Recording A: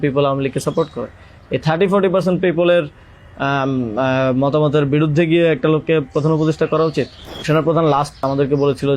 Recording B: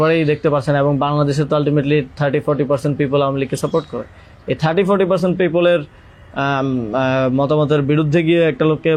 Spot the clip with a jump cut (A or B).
A